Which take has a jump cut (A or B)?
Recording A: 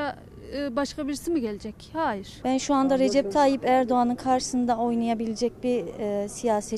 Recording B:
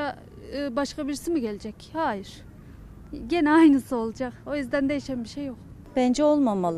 A